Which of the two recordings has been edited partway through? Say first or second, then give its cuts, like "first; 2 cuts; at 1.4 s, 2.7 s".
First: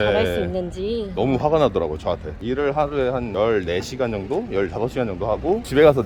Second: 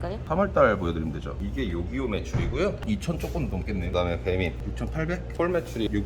second; 2 cuts; at 3.9 s, 5.3 s